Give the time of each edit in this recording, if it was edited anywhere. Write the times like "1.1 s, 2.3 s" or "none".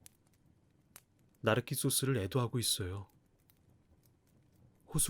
1.0 s